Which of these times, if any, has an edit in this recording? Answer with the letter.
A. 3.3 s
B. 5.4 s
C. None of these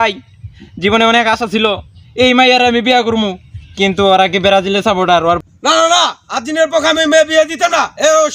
B